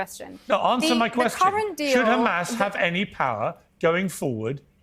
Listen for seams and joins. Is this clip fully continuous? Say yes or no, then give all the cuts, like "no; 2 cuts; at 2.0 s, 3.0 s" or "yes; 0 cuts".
yes; 0 cuts